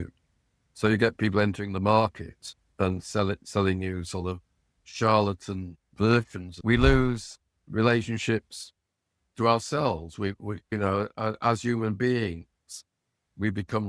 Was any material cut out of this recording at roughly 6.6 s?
yes; 2 cuts; at 6.6 s, 10.6 s

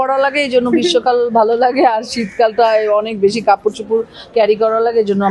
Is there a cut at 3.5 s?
no; 0 cuts

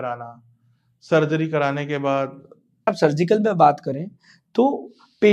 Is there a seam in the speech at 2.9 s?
yes; 1 cut; at 2.9 s

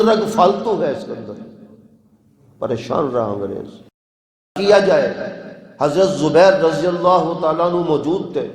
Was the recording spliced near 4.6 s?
yes; 1 cut; at 4.6 s

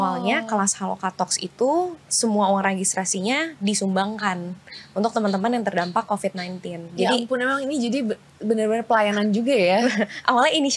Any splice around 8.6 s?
no; 0 cuts

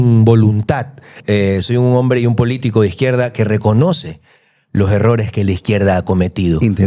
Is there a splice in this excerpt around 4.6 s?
no; 1 cut; at 1.1 s

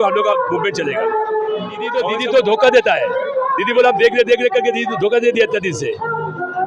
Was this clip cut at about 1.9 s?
no; 0 cuts

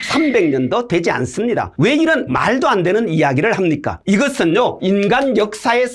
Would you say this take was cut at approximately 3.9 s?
yes; 2 cuts; at 1.7 s, 3.9 s

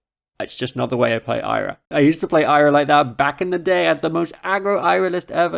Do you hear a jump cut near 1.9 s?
yes; 1 cut; at 1.9 s

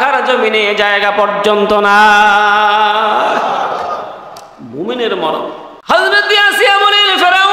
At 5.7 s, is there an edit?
yes; 1 cut; at 5.7 s

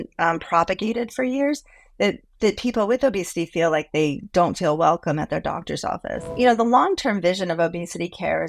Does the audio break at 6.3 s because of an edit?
yes; 1 cut; at 6.3 s

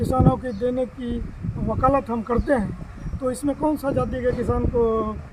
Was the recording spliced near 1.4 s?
no; 0 cuts

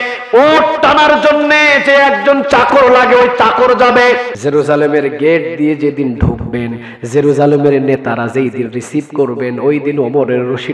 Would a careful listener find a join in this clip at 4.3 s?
yes; 1 cut; at 4.3 s

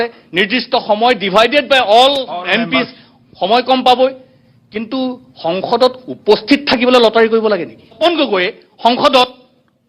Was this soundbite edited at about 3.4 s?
no; 1 cut; at 8.0 s

